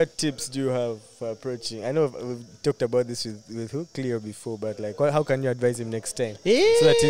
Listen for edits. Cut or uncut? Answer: uncut